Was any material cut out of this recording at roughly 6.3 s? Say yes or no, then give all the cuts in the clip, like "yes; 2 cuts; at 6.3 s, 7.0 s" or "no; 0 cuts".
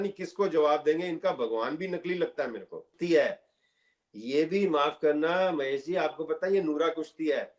no; 1 cut; at 3.0 s